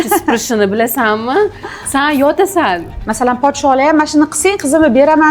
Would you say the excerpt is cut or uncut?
cut